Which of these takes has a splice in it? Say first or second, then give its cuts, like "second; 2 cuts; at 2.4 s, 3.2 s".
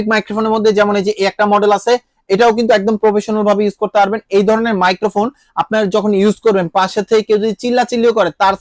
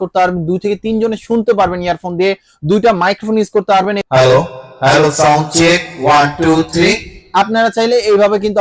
second; 1 cut; at 4.0 s